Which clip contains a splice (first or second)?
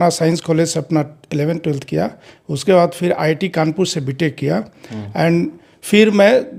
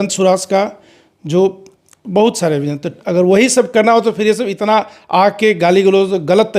second